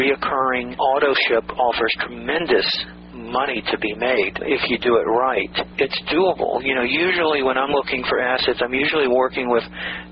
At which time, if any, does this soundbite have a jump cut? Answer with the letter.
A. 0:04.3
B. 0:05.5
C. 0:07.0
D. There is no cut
D